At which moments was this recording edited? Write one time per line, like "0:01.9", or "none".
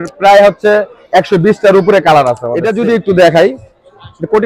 0:02.6